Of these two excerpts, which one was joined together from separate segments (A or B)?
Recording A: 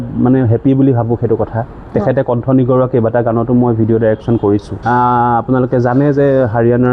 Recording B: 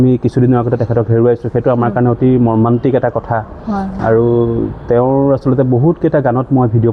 A